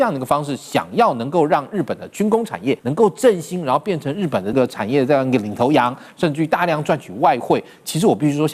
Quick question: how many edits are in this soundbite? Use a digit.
2